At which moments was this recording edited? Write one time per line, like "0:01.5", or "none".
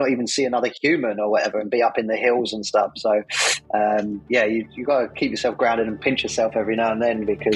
none